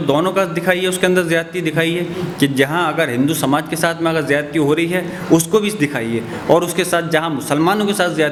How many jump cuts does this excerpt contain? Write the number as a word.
zero